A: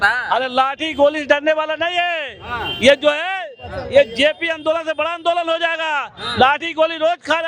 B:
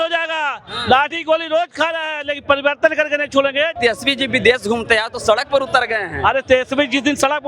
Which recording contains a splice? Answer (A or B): B